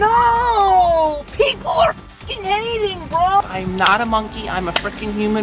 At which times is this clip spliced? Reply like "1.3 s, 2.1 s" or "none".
3.4 s